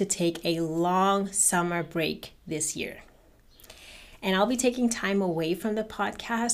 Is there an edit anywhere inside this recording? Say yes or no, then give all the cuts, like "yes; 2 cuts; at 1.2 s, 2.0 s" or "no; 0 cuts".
no; 0 cuts